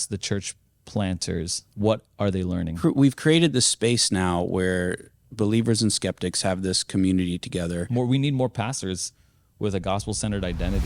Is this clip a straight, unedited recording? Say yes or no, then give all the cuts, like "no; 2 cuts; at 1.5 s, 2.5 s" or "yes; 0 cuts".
no; 3 cuts; at 1.6 s, 2.8 s, 7.8 s